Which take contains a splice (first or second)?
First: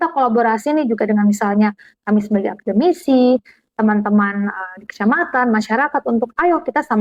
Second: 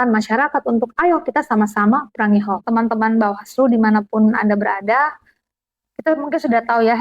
second